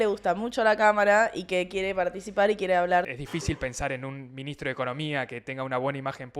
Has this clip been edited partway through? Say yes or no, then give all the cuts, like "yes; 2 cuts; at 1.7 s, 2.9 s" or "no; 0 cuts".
yes; 1 cut; at 3.1 s